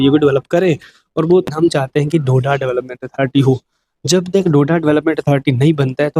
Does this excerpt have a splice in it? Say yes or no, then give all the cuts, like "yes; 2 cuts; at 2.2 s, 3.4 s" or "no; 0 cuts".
yes; 1 cut; at 1.5 s